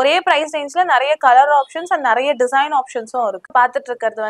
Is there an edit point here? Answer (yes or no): yes